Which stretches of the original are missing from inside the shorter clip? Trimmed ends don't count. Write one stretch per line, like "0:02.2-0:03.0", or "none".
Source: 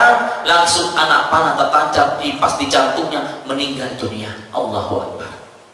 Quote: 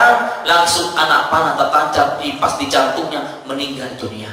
none